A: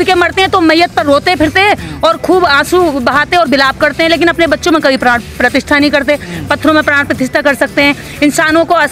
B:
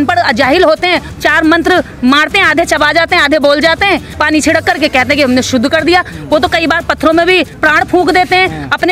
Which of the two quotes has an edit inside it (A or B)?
B